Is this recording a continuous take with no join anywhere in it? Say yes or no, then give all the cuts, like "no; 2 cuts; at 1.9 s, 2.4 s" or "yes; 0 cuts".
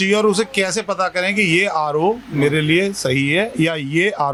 yes; 0 cuts